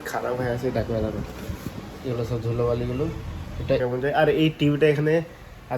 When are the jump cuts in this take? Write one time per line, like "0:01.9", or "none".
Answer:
0:03.8

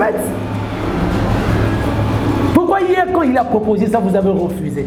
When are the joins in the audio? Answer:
none

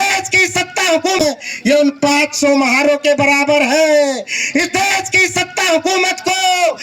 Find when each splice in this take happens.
0:01.3

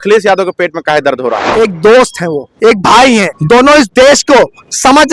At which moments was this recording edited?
0:01.4
0:03.3

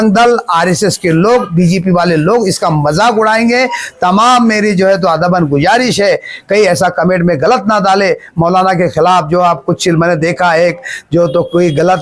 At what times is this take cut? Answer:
none

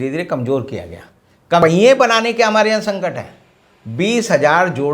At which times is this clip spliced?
0:01.6

